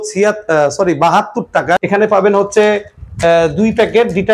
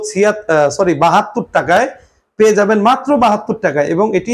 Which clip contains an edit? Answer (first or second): first